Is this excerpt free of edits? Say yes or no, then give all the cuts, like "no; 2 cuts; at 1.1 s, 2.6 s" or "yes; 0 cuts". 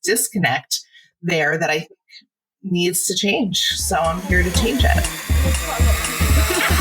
no; 1 cut; at 5.1 s